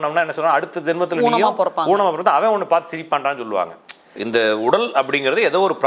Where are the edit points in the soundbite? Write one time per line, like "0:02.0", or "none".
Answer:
0:04.2